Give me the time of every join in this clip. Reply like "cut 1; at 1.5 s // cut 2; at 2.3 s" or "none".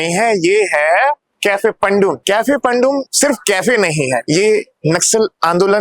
cut 1; at 1.3 s // cut 2; at 2.2 s // cut 3; at 3.1 s // cut 4; at 4.2 s